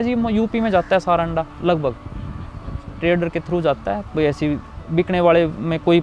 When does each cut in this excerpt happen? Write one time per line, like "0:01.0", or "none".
none